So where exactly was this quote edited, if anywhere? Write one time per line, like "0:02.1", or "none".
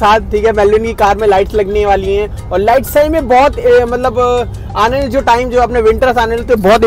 none